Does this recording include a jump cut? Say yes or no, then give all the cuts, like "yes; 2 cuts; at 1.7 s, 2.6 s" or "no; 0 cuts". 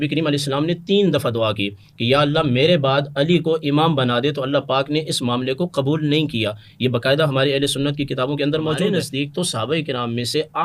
yes; 1 cut; at 8.9 s